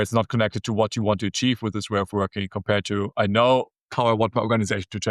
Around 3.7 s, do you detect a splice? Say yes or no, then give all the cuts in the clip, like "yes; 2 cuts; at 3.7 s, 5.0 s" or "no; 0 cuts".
yes; 1 cut; at 3.7 s